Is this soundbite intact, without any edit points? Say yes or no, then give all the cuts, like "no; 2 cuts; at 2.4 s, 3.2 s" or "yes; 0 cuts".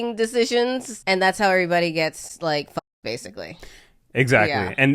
no; 1 cut; at 0.9 s